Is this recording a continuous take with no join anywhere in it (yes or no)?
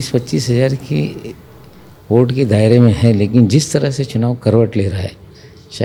yes